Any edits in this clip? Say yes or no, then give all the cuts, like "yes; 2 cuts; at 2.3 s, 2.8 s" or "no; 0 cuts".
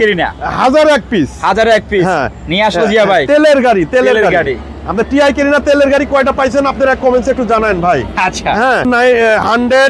yes; 1 cut; at 8.9 s